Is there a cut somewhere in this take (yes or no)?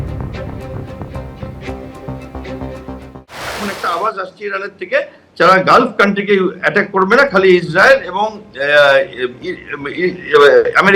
yes